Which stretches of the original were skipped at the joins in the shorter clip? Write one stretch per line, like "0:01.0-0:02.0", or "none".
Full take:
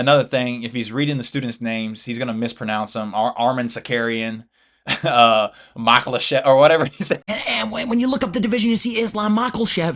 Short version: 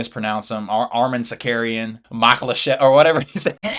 0:04.5-0:05.7

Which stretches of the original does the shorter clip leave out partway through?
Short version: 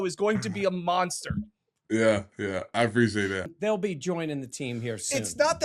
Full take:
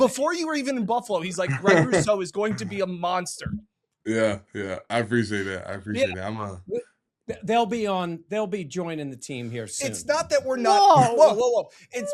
0:05.7-0:08.2

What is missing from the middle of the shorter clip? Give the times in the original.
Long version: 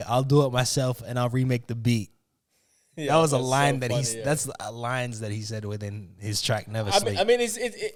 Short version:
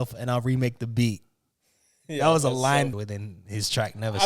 0:03.8-0:05.6

